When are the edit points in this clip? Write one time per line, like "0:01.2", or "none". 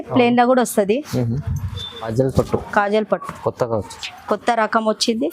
0:02.1

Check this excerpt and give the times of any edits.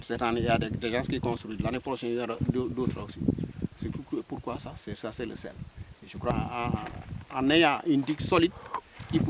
0:06.3

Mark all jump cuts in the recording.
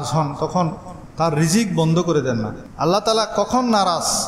0:02.6

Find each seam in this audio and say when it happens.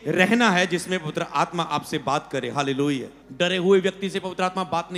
0:03.2

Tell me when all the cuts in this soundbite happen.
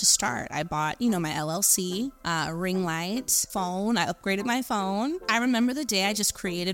0:02.2
0:03.4
0:05.2

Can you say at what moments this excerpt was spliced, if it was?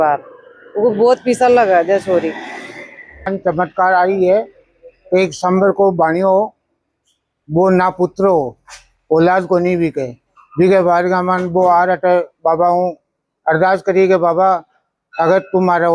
0:03.3

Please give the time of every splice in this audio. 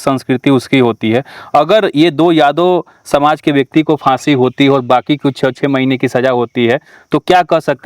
none

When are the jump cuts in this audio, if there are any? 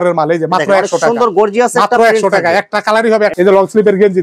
0:03.3

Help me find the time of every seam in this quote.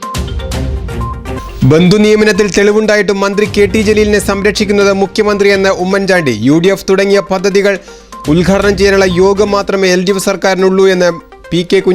0:01.1

